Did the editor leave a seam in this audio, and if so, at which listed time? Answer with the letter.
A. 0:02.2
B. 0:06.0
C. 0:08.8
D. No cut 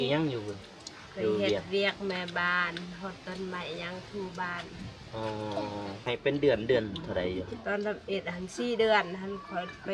B